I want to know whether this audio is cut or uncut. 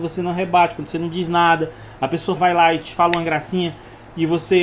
uncut